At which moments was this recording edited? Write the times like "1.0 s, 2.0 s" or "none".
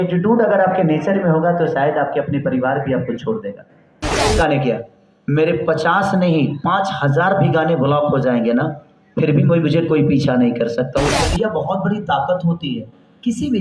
4.3 s, 11.1 s